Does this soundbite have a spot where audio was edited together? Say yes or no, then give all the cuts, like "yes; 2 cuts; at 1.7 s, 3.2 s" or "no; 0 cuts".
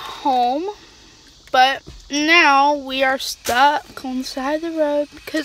no; 0 cuts